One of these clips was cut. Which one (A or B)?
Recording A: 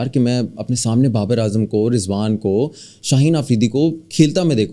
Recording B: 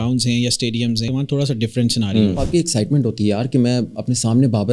B